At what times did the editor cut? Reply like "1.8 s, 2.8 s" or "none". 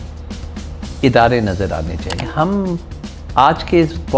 2.3 s